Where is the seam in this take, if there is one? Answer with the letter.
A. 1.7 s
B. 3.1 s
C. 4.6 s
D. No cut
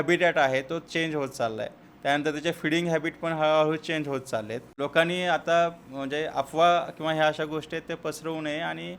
C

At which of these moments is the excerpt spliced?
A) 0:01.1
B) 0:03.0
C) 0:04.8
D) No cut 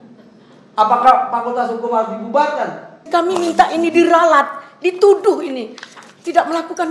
B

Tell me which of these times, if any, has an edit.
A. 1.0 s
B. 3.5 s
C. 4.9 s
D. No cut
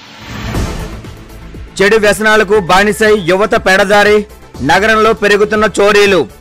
A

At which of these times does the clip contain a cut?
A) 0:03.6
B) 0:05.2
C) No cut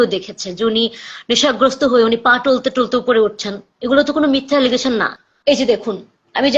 B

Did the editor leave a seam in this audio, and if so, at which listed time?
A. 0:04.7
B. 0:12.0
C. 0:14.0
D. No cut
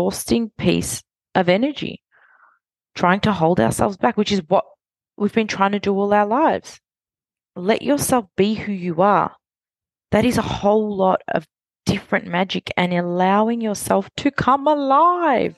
D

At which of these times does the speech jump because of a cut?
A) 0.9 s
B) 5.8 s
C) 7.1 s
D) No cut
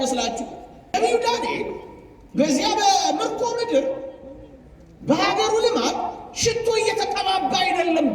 A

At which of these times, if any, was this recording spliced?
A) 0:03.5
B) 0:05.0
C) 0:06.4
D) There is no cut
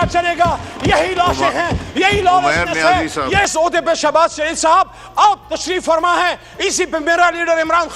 A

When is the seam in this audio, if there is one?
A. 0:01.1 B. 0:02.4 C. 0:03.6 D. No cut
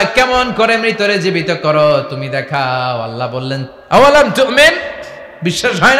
C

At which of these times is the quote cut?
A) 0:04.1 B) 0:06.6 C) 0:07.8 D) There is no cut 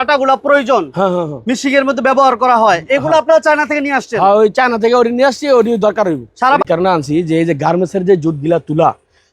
B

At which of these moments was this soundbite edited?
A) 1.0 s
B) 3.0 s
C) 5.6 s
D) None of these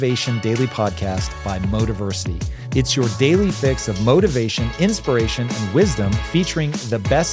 D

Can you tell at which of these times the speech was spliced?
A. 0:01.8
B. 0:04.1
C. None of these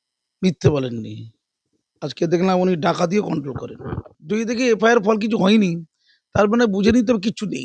B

